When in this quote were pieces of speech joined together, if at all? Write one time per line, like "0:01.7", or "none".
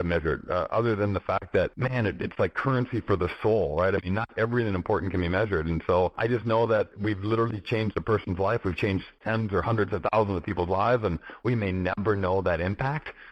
0:01.8
0:06.2
0:06.9
0:09.1